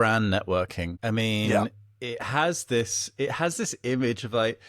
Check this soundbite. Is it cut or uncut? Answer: cut